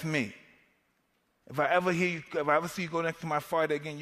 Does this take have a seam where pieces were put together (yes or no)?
no